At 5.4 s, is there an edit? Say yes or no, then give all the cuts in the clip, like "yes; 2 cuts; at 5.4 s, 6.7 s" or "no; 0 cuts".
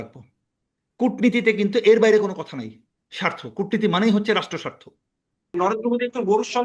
yes; 1 cut; at 5.4 s